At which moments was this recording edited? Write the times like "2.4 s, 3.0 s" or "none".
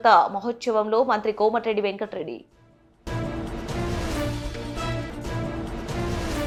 none